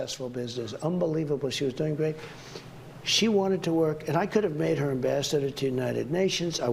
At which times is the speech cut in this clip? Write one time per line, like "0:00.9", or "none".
0:04.4